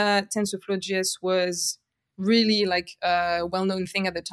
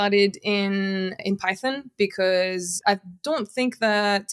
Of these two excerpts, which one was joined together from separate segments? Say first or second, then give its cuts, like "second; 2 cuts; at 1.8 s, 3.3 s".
second; 2 cuts; at 1.2 s, 2.7 s